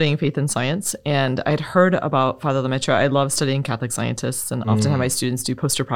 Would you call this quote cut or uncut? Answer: uncut